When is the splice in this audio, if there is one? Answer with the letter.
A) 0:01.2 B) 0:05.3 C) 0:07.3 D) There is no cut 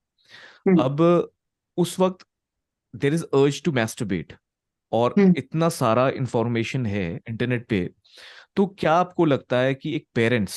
C